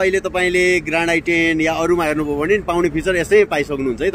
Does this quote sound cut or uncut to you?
uncut